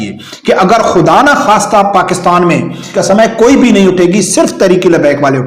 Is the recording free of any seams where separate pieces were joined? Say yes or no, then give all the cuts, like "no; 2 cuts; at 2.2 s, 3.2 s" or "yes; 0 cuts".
no; 1 cut; at 2.9 s